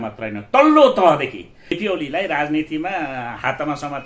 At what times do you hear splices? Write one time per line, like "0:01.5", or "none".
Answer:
0:01.8